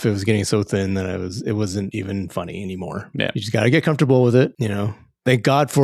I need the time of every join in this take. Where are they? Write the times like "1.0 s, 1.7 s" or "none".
none